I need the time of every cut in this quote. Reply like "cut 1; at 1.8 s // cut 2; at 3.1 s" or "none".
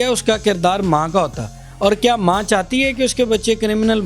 none